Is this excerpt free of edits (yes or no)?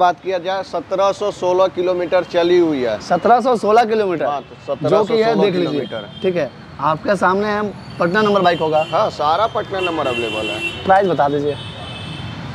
yes